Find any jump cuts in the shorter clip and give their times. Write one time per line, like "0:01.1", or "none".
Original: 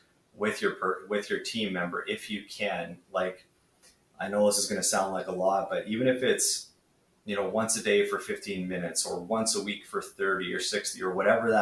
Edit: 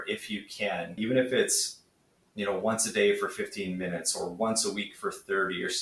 0:00.9